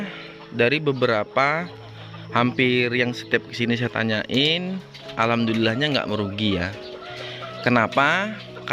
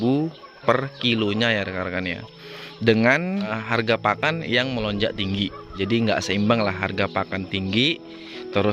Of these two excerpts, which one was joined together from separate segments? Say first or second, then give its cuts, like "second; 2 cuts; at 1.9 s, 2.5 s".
second; 2 cuts; at 3.6 s, 5.7 s